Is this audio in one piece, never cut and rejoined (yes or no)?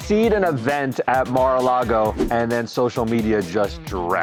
yes